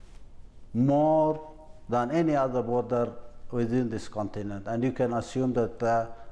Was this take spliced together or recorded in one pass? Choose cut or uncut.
uncut